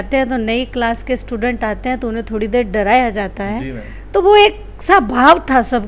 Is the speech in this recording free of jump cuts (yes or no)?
yes